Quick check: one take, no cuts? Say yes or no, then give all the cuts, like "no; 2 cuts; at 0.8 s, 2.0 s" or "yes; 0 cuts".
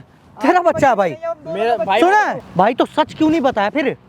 no; 1 cut; at 2.4 s